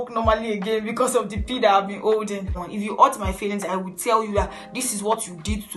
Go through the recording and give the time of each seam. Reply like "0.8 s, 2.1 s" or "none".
2.6 s